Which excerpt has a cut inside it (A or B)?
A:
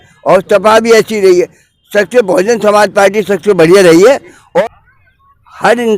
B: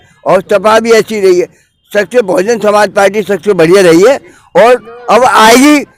A